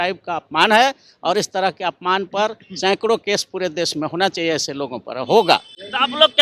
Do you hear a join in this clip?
no; 0 cuts

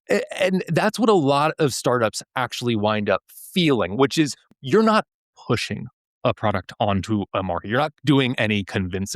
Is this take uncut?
no; 1 cut; at 4.4 s

